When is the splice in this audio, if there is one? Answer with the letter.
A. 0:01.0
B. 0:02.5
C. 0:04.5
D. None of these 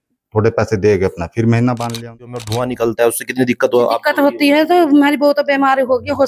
B